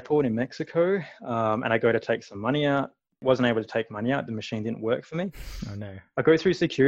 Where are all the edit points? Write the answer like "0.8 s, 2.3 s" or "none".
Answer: 3.2 s